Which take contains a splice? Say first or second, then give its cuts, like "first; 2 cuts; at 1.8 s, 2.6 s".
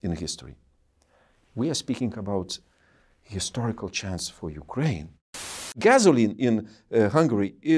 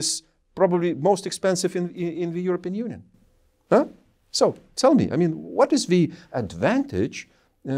first; 1 cut; at 5.7 s